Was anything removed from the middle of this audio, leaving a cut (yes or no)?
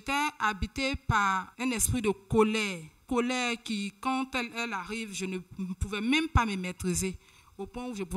yes